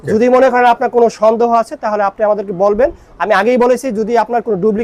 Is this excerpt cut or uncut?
uncut